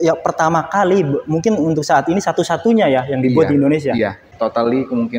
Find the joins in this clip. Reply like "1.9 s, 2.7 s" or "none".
4.3 s

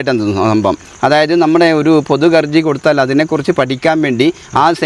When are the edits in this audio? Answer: none

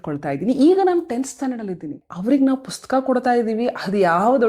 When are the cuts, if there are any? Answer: 2.1 s

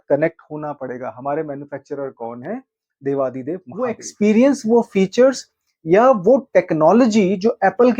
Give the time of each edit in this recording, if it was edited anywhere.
4.0 s

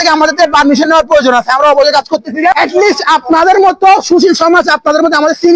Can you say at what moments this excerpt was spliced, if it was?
2.5 s

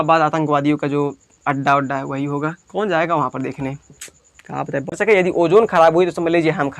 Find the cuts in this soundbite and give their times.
5.0 s

